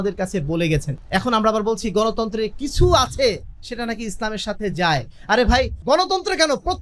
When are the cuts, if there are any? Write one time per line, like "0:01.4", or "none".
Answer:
0:00.9
0:05.8